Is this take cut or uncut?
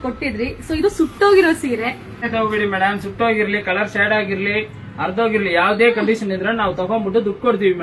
cut